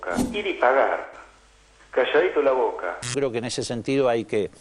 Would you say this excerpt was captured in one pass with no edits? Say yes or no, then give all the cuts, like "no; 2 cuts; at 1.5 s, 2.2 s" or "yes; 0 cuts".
no; 1 cut; at 3.0 s